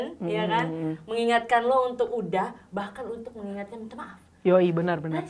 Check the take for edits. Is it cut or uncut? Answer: uncut